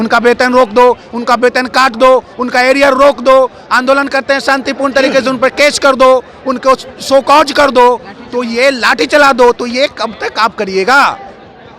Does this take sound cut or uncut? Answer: uncut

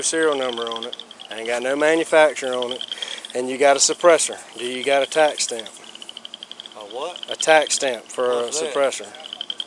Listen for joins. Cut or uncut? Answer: uncut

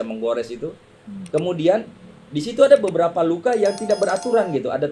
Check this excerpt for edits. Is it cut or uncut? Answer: uncut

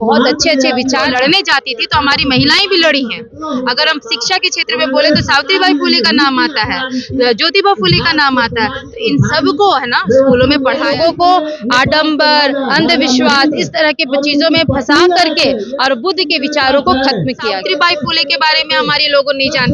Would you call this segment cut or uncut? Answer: cut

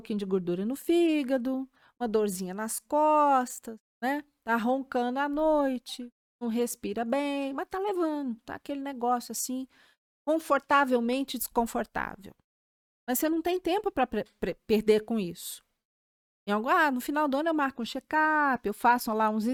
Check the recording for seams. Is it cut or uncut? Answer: uncut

